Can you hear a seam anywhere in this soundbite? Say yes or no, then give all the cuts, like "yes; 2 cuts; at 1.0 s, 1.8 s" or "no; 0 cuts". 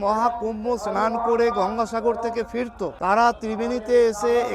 yes; 1 cut; at 2.9 s